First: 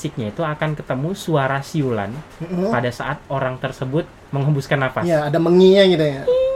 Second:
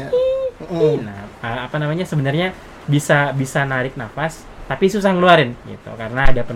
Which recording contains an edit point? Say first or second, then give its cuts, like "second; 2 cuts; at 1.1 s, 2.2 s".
second; 1 cut; at 5.6 s